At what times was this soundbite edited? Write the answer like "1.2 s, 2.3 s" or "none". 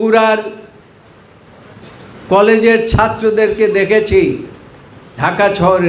none